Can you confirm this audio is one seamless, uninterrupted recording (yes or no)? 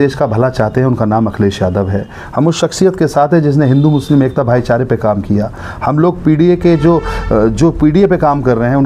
yes